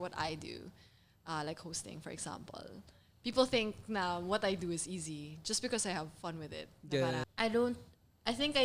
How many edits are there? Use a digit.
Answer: 1